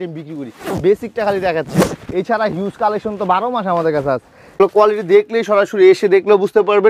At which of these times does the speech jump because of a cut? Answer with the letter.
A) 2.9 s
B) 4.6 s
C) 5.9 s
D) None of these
B